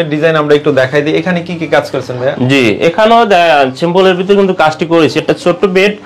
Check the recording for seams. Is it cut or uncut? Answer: uncut